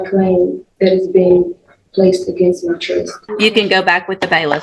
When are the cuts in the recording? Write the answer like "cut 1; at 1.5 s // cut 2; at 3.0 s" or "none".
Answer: cut 1; at 3.2 s